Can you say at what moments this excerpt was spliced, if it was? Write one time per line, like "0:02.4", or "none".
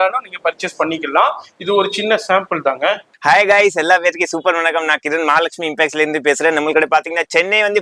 none